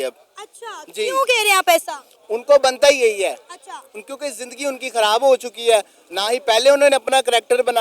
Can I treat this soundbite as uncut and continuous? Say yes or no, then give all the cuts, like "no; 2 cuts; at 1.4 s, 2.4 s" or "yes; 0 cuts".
yes; 0 cuts